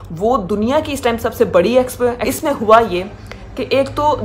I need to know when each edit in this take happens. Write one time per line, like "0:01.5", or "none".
0:02.2

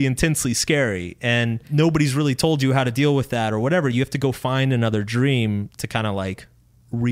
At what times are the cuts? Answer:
0:01.6

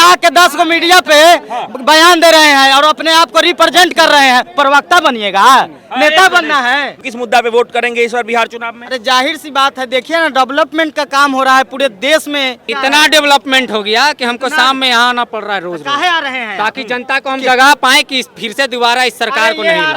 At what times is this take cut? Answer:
0:07.0
0:12.6

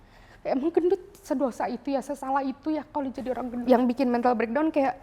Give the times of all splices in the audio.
0:03.6

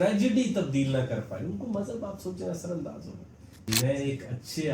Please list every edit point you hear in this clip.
0:03.7

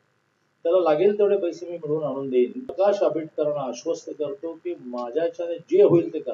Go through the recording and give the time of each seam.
0:02.7

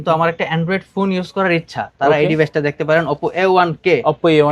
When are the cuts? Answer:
none

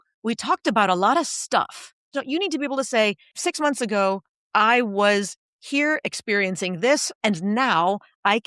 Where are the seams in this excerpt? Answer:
0:02.1
0:03.3
0:07.1

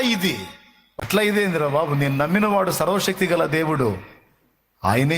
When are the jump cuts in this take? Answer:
0:01.0

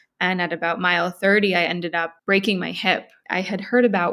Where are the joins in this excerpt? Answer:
0:02.1
0:03.2

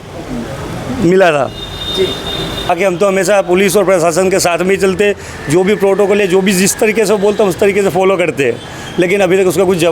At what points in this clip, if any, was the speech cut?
0:02.7

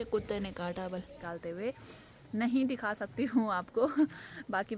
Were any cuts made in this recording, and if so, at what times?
0:01.2

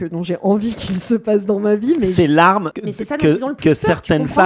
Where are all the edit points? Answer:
0:02.8

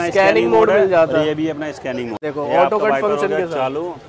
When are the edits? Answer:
0:02.2

